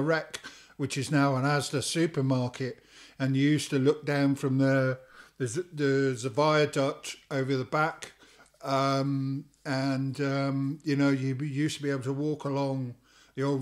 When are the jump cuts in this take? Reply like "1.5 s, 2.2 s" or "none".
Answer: none